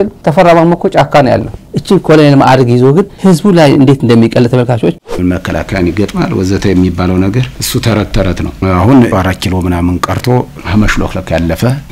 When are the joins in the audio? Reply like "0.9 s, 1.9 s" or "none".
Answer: 1.6 s, 5.0 s